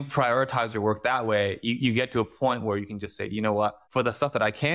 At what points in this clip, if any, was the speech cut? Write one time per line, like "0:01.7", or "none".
0:03.8